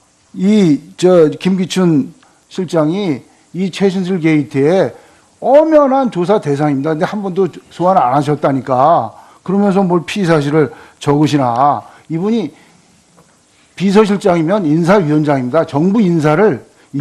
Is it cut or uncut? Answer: uncut